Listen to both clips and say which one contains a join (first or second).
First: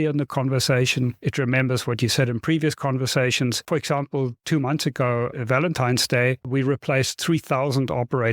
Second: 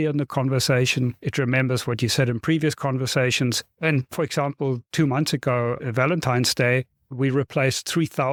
first